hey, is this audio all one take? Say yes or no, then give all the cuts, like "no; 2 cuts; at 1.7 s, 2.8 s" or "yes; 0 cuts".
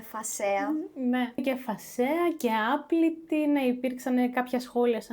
no; 1 cut; at 1.4 s